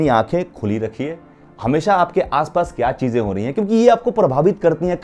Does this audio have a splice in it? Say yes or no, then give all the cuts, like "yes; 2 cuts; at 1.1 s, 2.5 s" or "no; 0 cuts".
no; 0 cuts